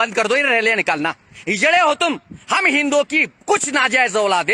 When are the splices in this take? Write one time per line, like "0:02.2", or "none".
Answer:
0:02.4